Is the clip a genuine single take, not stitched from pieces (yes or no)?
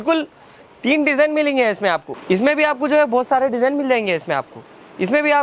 no